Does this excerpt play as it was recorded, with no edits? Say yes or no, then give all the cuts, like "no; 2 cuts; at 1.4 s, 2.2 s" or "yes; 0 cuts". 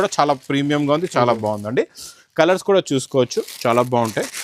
yes; 0 cuts